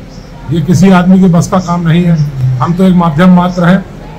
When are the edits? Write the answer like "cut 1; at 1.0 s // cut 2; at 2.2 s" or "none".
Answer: none